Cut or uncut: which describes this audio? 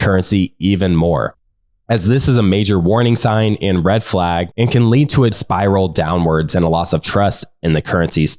cut